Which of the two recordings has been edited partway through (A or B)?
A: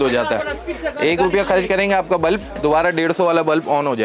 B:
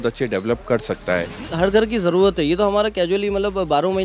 B